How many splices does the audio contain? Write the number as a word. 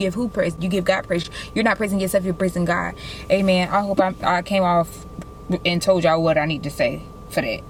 zero